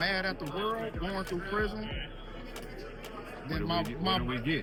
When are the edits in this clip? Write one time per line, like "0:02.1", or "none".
none